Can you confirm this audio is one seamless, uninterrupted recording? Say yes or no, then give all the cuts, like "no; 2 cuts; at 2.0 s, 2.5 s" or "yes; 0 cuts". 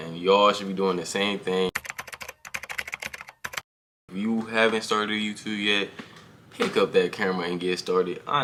yes; 0 cuts